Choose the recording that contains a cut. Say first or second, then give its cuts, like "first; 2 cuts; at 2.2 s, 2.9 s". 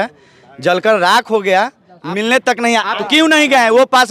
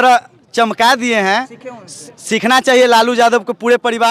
first; 1 cut; at 2.9 s